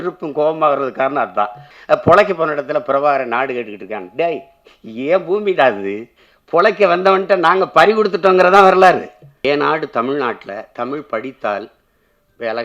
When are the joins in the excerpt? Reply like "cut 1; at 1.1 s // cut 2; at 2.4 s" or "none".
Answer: cut 1; at 1.7 s // cut 2; at 9.4 s